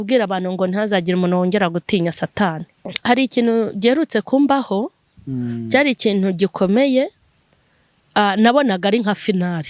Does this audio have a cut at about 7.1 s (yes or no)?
no